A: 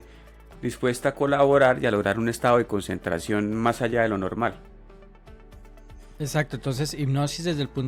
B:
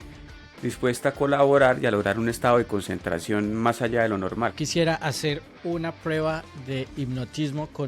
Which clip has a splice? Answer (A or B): B